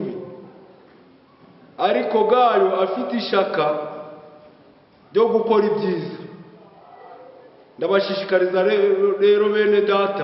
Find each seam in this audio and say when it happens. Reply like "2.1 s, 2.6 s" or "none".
none